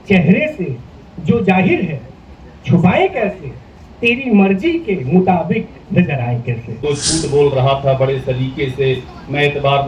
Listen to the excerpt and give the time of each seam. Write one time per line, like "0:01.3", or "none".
0:06.7